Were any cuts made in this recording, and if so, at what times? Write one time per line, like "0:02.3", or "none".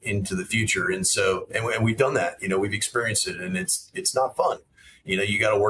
none